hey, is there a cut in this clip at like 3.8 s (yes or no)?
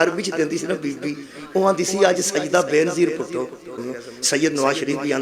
yes